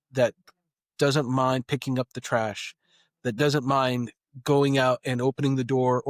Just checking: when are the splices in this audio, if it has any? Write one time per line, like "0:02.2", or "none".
none

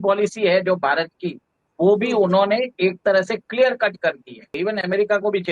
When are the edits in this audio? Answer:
0:04.5

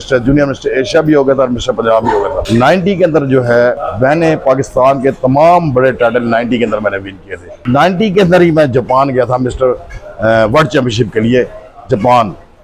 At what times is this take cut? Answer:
0:02.4
0:03.9
0:07.6

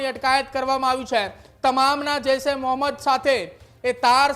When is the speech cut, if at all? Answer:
none

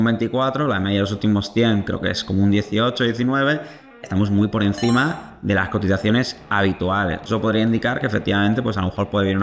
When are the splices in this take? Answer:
none

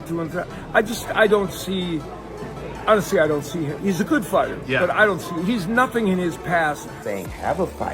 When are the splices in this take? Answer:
0:06.9

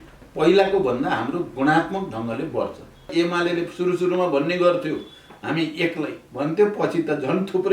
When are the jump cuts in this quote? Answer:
0:03.1

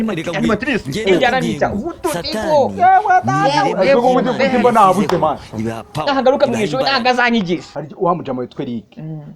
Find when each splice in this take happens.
0:07.8

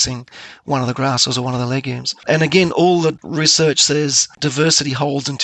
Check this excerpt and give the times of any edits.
0:02.1
0:03.2
0:04.3

